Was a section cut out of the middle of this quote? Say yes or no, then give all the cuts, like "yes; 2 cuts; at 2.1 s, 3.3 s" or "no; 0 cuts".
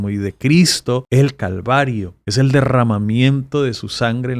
yes; 2 cuts; at 1.0 s, 2.2 s